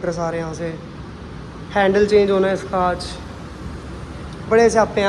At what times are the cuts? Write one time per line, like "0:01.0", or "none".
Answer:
none